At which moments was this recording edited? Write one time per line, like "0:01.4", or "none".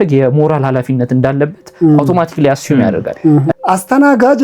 0:03.5